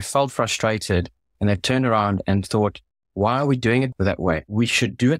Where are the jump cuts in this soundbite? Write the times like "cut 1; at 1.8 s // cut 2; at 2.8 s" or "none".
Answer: cut 1; at 4.3 s